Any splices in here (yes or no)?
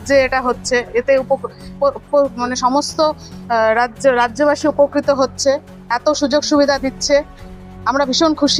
no